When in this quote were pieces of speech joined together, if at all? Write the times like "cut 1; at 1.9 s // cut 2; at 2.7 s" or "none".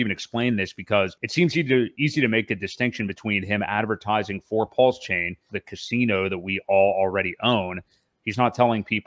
cut 1; at 1.2 s // cut 2; at 5.6 s